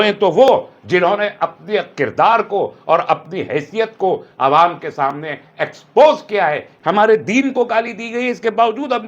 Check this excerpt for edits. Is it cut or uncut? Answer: cut